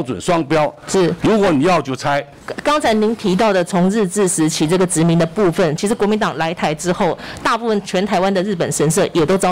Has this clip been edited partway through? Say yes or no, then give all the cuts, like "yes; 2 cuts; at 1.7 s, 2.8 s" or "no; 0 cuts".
yes; 2 cuts; at 2.3 s, 5.8 s